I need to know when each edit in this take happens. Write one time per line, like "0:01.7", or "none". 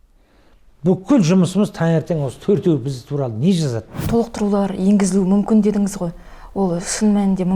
0:04.0